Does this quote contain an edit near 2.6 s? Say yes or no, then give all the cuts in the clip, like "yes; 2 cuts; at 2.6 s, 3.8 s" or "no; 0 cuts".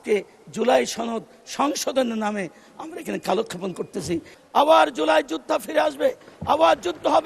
no; 1 cut; at 4.3 s